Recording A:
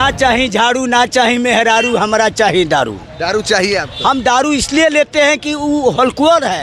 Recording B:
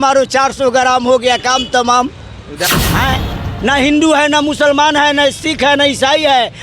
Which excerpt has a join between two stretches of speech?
B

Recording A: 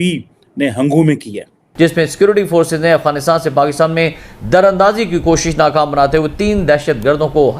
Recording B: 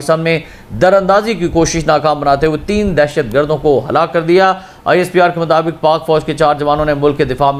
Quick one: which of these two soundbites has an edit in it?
A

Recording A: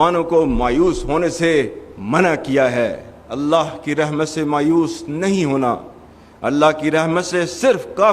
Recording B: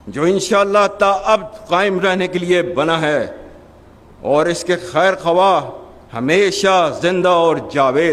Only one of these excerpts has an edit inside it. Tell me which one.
A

